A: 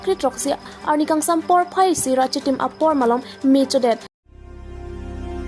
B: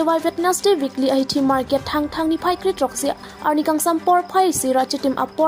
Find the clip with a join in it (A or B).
A